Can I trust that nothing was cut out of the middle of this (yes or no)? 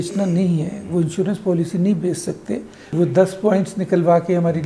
no